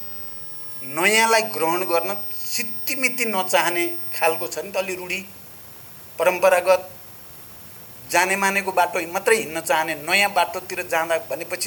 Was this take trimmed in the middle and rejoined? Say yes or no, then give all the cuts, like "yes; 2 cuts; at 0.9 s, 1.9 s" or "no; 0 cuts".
no; 0 cuts